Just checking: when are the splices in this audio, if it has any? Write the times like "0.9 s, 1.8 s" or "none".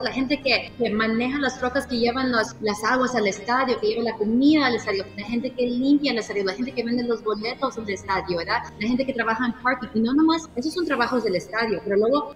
none